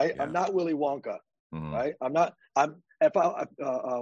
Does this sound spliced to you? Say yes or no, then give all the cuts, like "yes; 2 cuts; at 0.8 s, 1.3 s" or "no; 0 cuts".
no; 0 cuts